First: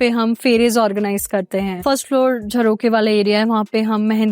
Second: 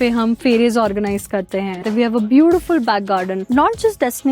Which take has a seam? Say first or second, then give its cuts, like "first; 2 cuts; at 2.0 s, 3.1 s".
second; 2 cuts; at 1.8 s, 3.4 s